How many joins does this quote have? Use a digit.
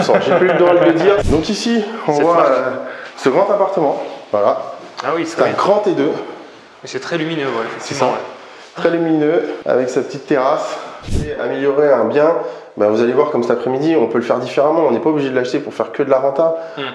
2